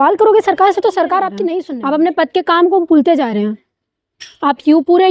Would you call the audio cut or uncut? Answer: cut